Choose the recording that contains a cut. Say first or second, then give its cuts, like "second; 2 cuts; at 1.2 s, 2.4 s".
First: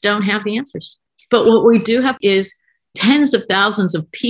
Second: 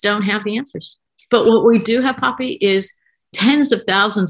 first; 1 cut; at 2.2 s